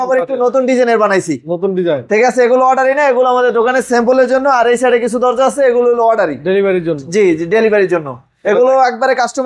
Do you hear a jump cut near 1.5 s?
no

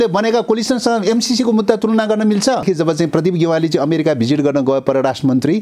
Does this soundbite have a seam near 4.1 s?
no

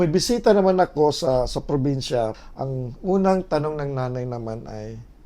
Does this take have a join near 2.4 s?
yes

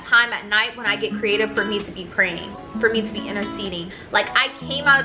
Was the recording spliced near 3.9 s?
yes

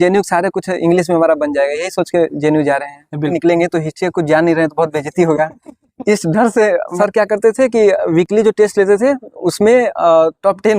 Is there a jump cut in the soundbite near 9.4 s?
no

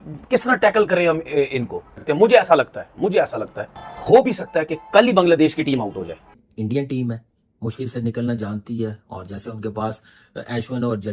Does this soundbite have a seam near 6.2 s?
yes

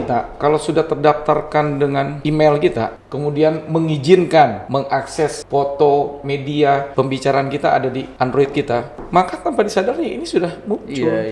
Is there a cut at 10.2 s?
no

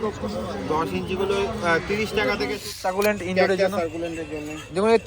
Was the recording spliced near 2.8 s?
yes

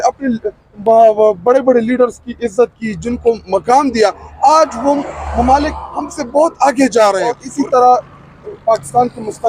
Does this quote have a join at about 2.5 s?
no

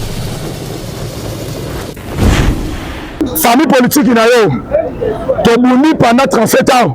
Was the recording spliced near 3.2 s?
yes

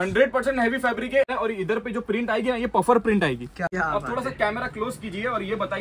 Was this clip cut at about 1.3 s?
yes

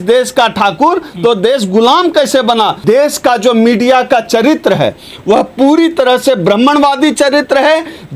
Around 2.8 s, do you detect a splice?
yes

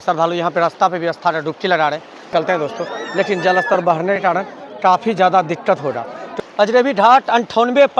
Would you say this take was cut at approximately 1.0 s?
no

